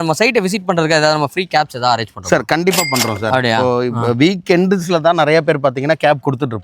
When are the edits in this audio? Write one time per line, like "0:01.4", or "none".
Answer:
none